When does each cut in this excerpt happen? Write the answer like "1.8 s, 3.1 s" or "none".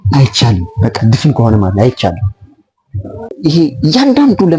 3.3 s